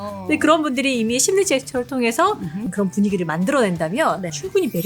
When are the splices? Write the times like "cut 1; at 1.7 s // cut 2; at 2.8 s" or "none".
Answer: cut 1; at 2.6 s

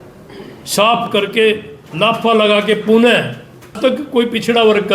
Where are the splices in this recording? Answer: cut 1; at 3.8 s

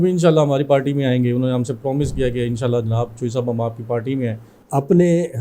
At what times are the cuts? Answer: cut 1; at 4.5 s

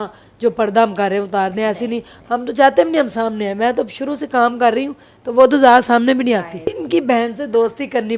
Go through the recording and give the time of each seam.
cut 1; at 6.7 s

